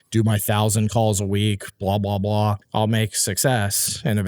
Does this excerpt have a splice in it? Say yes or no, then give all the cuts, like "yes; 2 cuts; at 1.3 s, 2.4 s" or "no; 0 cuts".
yes; 1 cut; at 2.6 s